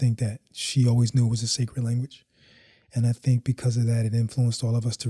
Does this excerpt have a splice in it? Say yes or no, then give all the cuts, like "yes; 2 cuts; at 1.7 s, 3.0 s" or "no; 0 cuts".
no; 0 cuts